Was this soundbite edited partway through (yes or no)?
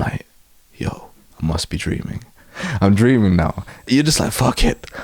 yes